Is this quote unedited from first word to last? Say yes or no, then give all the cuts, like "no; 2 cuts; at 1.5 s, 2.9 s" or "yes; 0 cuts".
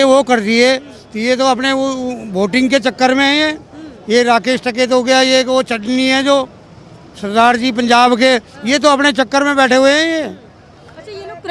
yes; 0 cuts